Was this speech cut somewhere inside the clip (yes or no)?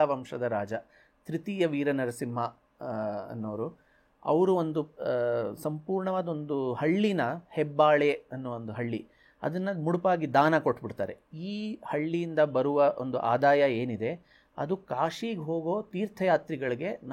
no